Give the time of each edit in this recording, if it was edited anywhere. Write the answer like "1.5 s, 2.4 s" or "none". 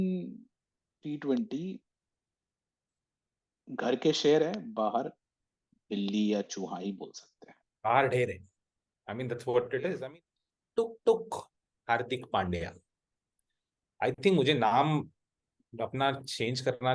10.0 s